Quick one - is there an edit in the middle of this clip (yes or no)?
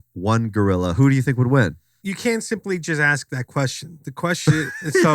yes